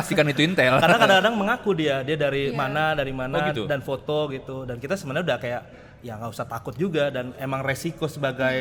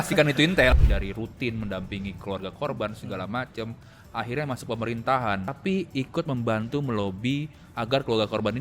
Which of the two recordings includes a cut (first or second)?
second